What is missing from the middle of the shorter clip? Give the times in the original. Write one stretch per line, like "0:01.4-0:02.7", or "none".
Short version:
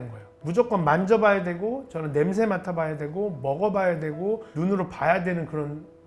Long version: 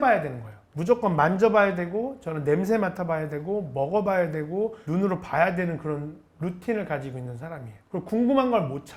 none